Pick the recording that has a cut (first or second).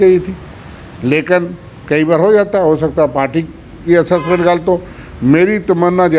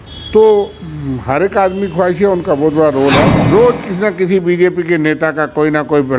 second